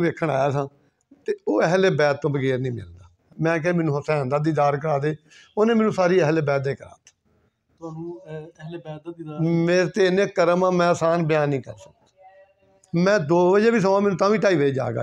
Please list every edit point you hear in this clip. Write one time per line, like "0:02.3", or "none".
0:03.3